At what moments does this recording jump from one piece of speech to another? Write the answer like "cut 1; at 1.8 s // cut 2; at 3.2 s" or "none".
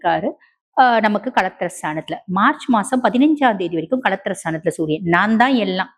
none